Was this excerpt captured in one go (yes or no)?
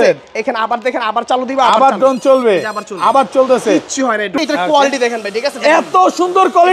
no